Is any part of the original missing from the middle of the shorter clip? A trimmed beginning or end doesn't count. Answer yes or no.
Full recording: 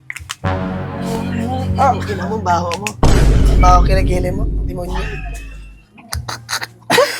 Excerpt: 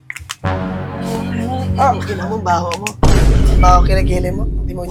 no